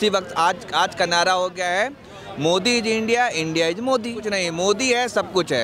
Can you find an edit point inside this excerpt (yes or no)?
yes